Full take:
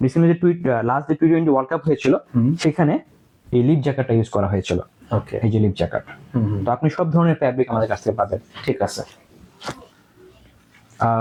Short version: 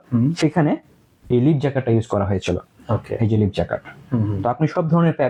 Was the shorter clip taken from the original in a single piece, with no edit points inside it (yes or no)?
yes